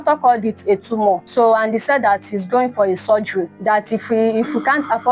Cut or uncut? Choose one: cut